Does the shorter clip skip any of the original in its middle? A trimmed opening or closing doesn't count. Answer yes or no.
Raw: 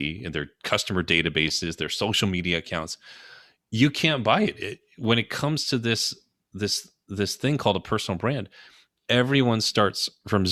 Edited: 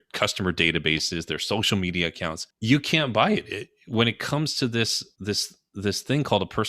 yes